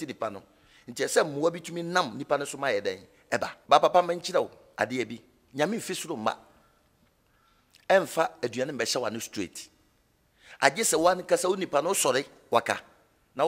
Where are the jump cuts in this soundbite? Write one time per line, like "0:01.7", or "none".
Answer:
0:03.5